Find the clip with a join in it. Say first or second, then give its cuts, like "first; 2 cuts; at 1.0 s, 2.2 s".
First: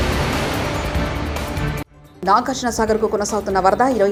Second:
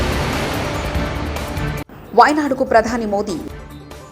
second; 1 cut; at 1.9 s